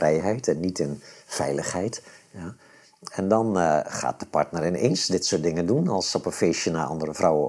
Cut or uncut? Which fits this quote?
uncut